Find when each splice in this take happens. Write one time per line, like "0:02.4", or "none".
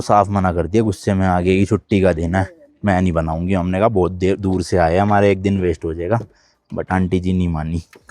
none